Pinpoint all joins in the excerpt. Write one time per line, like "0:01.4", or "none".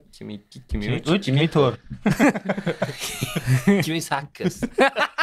none